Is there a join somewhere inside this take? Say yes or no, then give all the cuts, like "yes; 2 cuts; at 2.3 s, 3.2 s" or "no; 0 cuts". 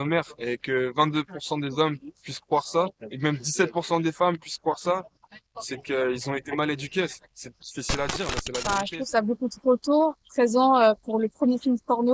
yes; 1 cut; at 8.6 s